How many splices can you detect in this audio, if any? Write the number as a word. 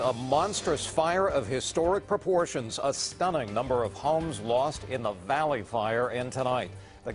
zero